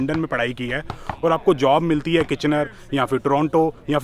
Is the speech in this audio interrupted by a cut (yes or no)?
no